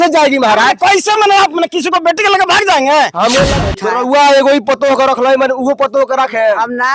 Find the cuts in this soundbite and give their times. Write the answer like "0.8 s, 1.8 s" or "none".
3.5 s